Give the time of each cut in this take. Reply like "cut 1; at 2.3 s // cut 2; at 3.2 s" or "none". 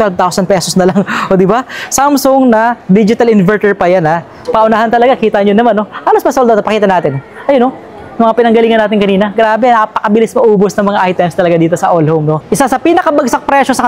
cut 1; at 4.3 s // cut 2; at 12.4 s